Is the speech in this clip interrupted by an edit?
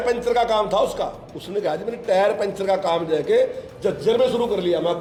no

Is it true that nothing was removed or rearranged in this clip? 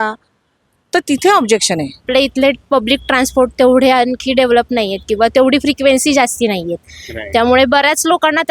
no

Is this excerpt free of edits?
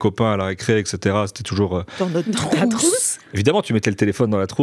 yes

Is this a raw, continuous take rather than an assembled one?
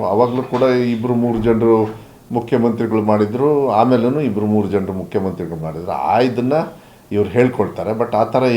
yes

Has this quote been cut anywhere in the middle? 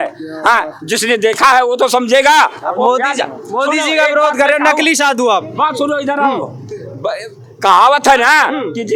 no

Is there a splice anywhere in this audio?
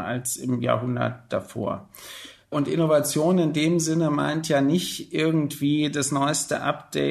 no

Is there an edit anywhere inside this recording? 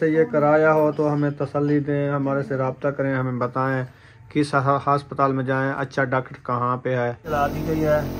yes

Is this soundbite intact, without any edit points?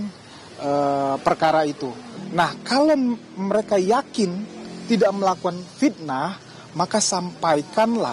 no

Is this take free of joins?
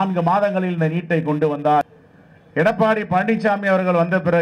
no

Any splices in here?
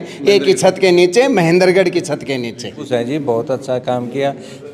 yes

